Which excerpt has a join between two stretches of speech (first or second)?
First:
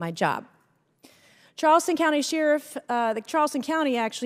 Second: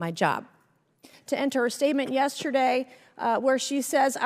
second